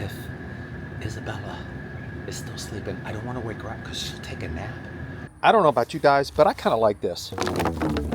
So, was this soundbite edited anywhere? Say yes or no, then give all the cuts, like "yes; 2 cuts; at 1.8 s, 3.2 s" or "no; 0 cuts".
yes; 1 cut; at 5.2 s